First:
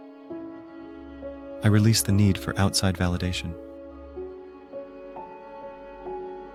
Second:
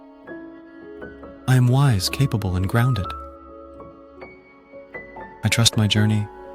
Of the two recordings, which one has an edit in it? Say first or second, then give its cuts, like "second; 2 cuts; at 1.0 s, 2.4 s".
second; 3 cuts; at 1.1 s, 3.1 s, 5.4 s